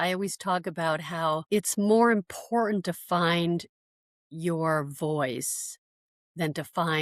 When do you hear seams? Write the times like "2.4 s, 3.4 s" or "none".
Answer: 1.4 s